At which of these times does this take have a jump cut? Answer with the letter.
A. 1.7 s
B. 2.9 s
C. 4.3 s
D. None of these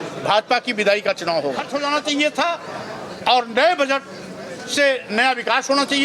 A